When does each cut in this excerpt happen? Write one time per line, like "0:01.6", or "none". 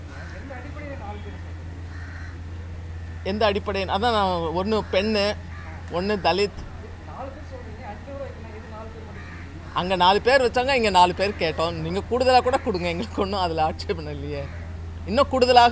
none